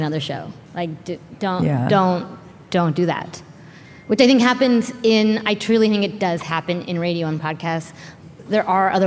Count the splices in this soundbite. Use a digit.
1